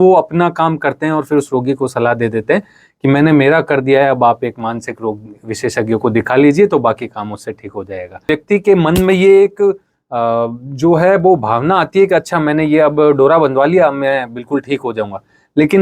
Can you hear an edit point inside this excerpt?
yes; 1 cut; at 8.3 s

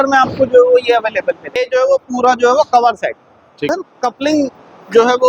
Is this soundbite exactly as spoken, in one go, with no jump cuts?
no; 2 cuts; at 1.6 s, 3.7 s

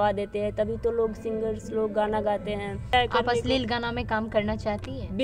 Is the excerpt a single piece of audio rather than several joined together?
no; 1 cut; at 2.9 s

